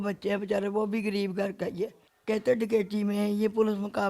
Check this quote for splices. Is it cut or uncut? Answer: cut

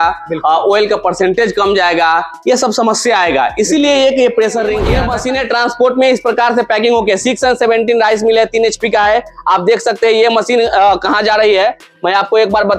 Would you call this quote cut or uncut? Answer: cut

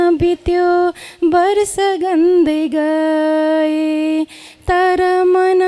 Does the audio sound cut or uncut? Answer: uncut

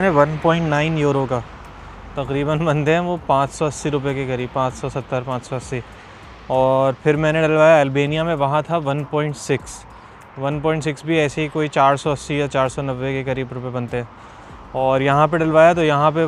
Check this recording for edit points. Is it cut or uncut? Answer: uncut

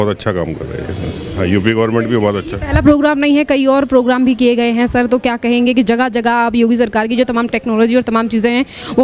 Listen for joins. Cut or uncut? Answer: uncut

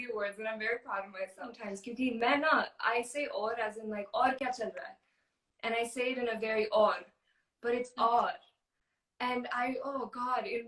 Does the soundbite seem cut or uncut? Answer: cut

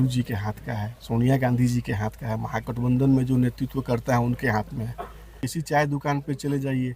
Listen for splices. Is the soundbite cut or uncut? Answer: cut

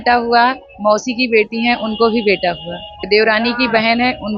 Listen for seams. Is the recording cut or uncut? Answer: cut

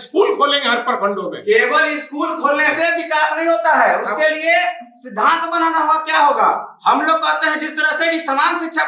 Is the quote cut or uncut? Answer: uncut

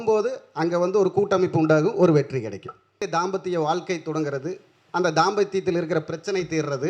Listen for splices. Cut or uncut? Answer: cut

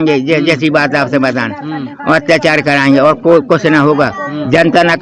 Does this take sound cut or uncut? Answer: uncut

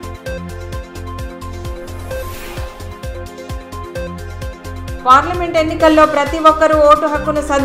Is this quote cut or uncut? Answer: uncut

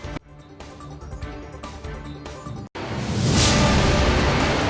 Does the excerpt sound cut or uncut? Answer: cut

